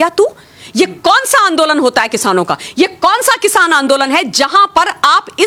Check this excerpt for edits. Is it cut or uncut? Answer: uncut